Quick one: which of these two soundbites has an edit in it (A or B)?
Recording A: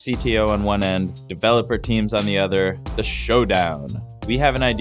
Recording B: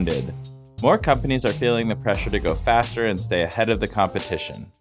A